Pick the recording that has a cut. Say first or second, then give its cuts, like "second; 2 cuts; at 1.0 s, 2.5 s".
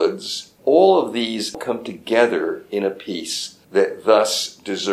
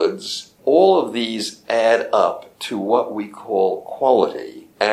first; 1 cut; at 1.6 s